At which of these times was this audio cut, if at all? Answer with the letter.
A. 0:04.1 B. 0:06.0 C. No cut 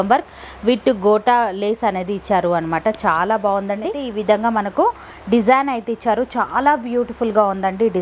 A